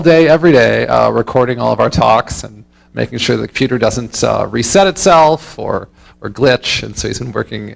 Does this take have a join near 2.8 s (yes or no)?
no